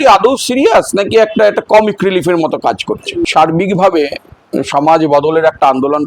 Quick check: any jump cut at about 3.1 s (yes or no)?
yes